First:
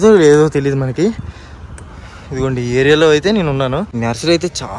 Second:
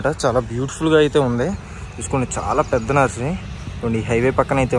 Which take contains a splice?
first; 1 cut; at 3.9 s

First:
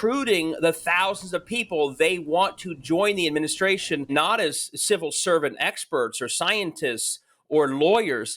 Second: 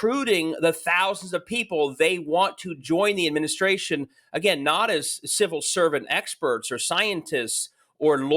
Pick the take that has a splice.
first; 1 cut; at 4.1 s

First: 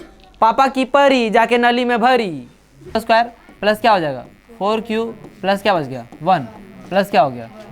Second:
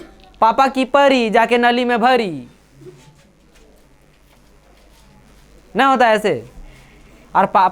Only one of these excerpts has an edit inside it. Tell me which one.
first; 1 cut; at 3.0 s

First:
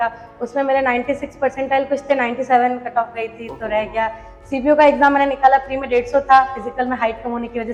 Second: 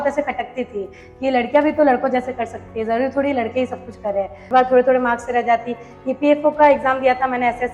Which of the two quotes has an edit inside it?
second; 1 cut; at 4.5 s

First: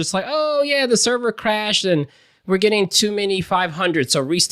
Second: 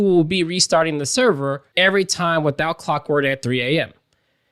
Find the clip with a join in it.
second; 1 cut; at 1.6 s

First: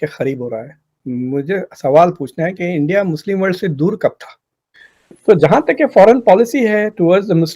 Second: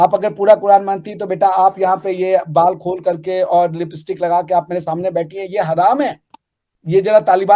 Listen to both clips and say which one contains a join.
first; 1 cut; at 4.8 s

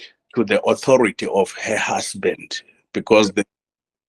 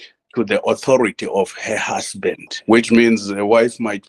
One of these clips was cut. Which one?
second; 1 cut; at 2.5 s

